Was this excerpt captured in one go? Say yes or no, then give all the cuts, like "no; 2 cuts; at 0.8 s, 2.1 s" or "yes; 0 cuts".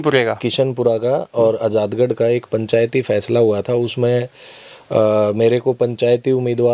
yes; 0 cuts